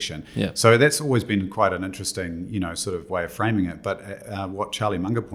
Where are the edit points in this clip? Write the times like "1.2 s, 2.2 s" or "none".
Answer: none